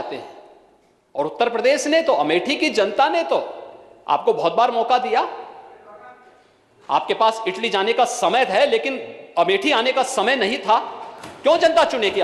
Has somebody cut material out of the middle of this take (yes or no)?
no